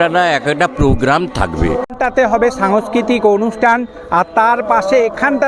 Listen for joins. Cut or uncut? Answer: cut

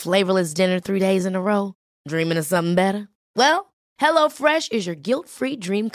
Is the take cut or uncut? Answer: uncut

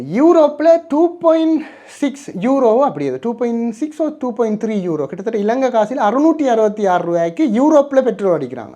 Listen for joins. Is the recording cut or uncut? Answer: uncut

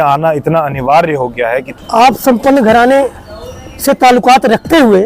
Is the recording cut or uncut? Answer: cut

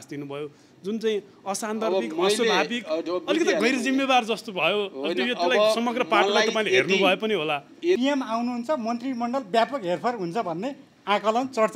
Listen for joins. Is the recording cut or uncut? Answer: cut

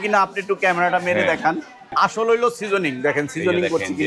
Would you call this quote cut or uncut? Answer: cut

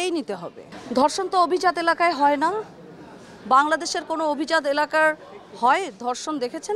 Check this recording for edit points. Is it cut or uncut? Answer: uncut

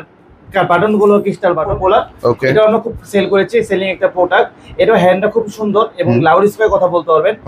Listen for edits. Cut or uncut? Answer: cut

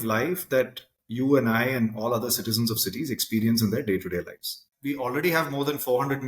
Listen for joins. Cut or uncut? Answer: cut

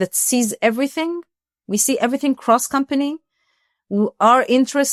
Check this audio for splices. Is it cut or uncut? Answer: uncut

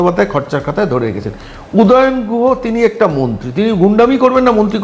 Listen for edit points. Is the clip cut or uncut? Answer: uncut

